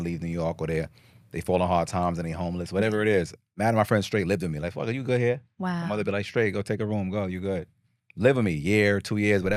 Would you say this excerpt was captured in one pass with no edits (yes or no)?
yes